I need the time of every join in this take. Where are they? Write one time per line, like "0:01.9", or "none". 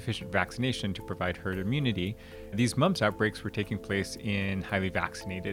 0:02.5